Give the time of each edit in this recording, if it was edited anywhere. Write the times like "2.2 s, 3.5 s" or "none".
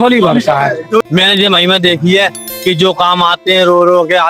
1.0 s